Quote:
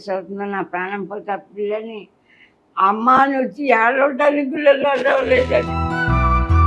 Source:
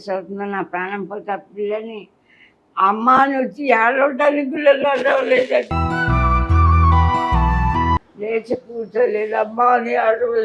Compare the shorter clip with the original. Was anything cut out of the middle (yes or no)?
no